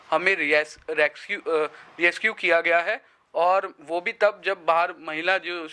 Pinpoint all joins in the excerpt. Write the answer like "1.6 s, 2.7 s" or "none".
none